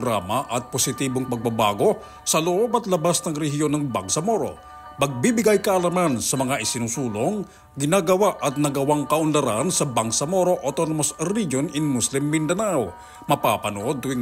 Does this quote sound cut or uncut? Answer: uncut